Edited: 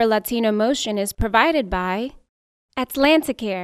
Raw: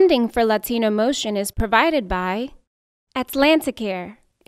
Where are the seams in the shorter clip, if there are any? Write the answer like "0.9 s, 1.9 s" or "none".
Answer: none